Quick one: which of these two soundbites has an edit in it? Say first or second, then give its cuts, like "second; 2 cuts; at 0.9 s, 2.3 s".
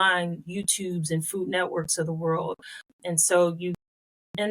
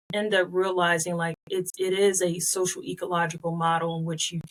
first; 1 cut; at 2.9 s